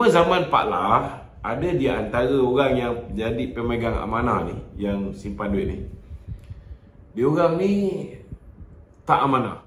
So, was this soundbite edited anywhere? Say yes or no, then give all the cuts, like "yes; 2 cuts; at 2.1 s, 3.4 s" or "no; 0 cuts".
no; 0 cuts